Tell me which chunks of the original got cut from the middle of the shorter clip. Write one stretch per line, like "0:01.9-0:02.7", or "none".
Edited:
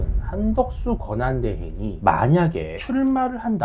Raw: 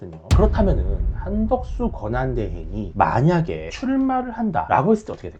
none